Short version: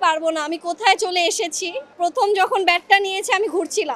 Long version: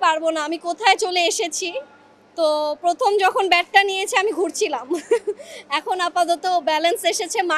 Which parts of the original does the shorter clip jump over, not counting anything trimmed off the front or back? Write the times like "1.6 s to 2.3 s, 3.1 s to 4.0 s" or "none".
1.9 s to 2.8 s